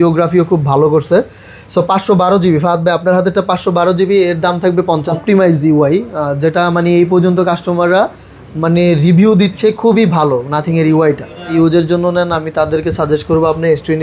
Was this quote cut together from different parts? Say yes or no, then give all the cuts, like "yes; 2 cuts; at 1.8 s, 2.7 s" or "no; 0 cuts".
yes; 2 cuts; at 5.1 s, 11.5 s